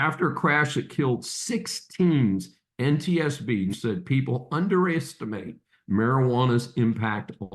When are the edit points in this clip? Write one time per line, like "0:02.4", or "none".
0:03.8